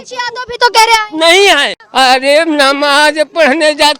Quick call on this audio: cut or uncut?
cut